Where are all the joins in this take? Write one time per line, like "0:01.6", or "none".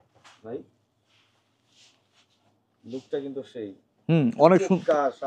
none